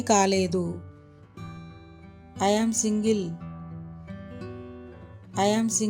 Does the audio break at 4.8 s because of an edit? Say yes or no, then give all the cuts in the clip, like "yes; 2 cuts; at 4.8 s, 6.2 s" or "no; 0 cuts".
no; 0 cuts